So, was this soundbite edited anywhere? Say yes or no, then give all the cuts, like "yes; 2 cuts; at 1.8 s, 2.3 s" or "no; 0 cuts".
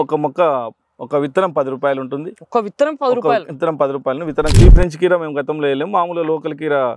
yes; 1 cut; at 4.5 s